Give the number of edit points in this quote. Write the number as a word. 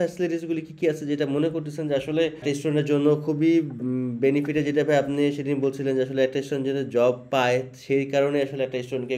two